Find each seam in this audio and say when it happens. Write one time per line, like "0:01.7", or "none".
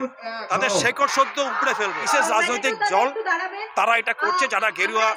0:02.0

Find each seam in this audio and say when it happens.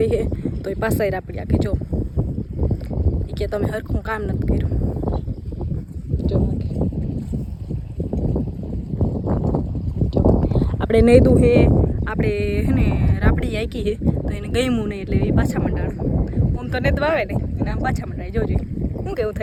none

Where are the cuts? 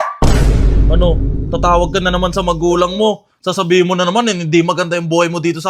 none

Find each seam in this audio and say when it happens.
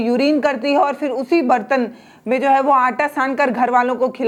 none

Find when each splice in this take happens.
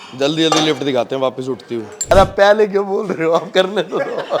0:02.1

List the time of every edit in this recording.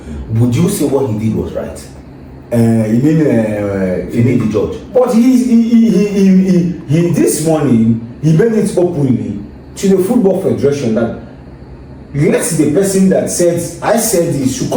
none

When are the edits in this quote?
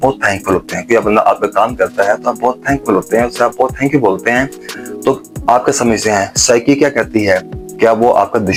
none

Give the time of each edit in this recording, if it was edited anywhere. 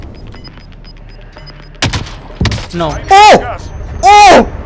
none

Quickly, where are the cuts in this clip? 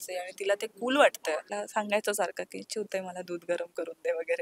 0:01.5

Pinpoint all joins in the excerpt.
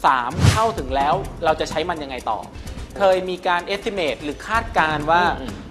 0:01.3
0:02.9

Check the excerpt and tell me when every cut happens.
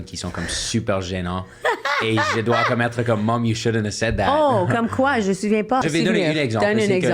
0:05.8

